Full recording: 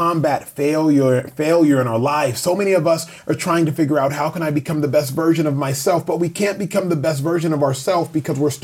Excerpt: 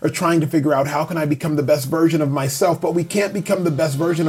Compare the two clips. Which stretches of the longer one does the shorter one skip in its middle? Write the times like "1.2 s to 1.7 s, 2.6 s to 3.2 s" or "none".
none